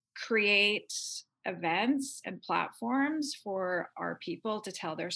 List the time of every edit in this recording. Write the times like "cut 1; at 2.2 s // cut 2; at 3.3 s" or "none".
none